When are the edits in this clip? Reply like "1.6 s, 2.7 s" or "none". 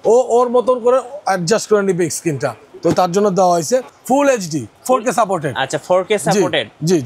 3.9 s

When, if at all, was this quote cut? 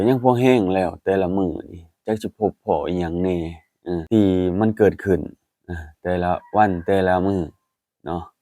4.0 s

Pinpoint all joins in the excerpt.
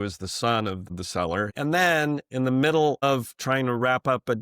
1.3 s

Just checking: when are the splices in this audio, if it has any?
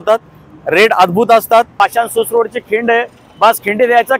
1.7 s

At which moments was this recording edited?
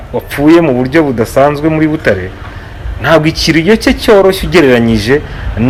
none

